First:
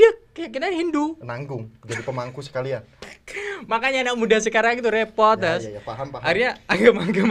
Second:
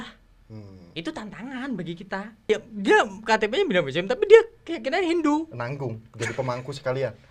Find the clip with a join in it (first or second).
second